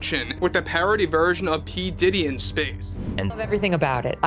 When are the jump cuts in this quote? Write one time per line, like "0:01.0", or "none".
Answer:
0:03.3